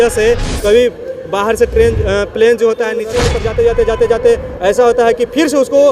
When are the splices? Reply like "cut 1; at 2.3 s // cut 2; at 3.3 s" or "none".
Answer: cut 1; at 3.1 s